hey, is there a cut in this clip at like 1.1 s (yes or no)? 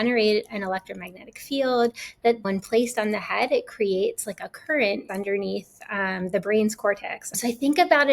no